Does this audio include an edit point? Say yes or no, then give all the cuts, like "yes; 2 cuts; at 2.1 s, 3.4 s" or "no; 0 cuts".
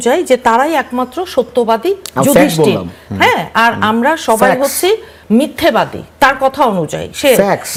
no; 0 cuts